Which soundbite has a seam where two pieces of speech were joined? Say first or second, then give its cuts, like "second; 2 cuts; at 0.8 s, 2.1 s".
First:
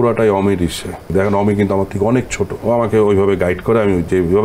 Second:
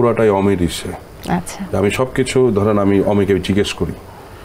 first; 2 cuts; at 1.1 s, 2.5 s